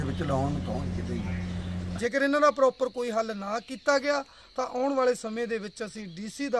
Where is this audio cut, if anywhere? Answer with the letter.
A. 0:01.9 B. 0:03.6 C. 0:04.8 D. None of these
A